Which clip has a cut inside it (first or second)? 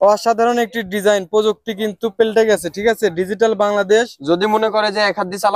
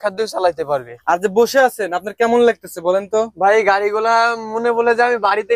second